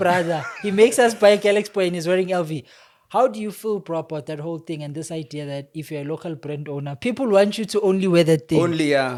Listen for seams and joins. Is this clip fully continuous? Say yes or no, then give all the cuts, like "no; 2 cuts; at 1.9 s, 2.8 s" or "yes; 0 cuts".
yes; 0 cuts